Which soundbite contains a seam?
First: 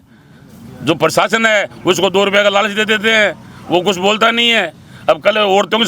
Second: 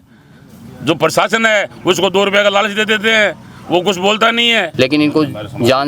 second; 1 cut; at 4.7 s

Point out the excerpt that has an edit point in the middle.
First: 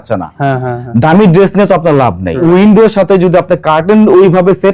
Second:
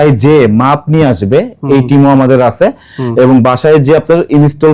first; 1 cut; at 2.4 s

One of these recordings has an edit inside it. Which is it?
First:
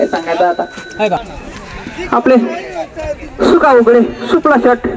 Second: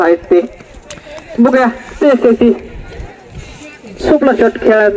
first; 1 cut; at 1.3 s

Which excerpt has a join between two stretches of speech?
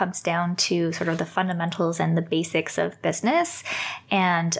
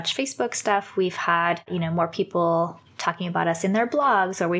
second; 1 cut; at 1.7 s

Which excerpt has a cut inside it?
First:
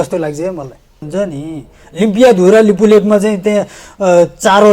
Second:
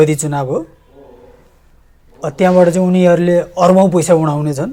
first; 1 cut; at 1.1 s

